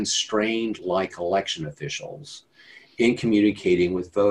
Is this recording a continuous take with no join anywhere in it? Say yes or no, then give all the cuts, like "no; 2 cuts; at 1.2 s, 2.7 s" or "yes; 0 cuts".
yes; 0 cuts